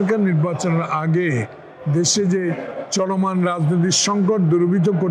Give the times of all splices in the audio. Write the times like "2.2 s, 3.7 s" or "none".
none